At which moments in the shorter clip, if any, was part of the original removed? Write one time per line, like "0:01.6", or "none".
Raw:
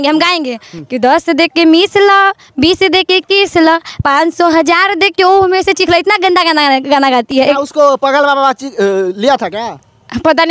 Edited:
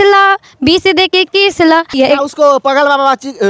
0:01.9